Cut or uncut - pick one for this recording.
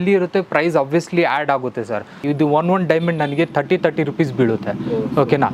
cut